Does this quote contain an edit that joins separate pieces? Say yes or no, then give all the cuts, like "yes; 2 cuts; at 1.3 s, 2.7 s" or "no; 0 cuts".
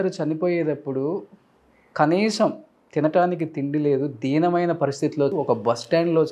yes; 1 cut; at 5.3 s